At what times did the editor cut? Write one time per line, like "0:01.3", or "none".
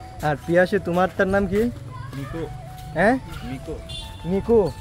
none